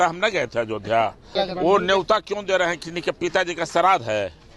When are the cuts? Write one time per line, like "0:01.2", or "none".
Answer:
0:01.3